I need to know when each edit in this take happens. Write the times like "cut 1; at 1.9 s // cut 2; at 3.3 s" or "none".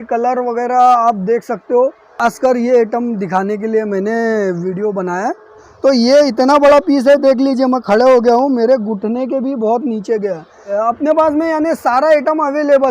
cut 1; at 2.1 s // cut 2; at 5.7 s // cut 3; at 10.7 s